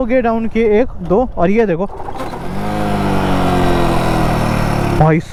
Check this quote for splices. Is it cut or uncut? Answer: uncut